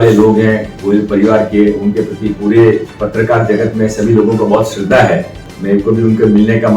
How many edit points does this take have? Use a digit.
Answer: 2